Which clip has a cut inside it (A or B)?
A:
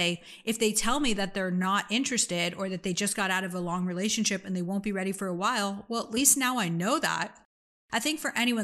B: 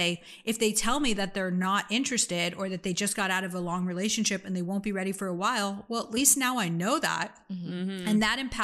A